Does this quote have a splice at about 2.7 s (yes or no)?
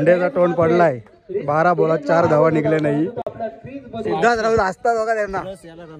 no